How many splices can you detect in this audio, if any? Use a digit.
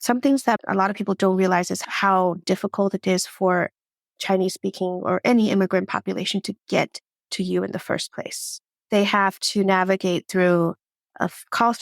1